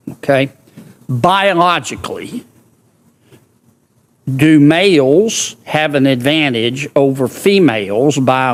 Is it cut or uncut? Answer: uncut